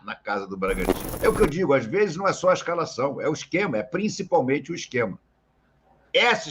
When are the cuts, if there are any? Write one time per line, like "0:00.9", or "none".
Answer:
0:01.0